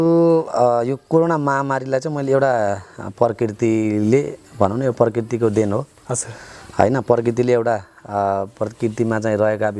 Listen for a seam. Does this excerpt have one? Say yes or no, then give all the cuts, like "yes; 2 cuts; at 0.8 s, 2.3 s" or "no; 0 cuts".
no; 0 cuts